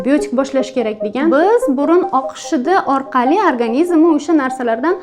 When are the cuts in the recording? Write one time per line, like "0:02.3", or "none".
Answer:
0:01.3